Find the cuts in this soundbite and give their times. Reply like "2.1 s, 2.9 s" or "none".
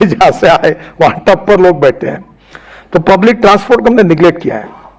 none